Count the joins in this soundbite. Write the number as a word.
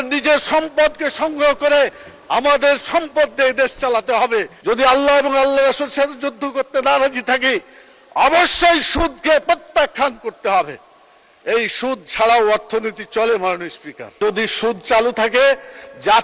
two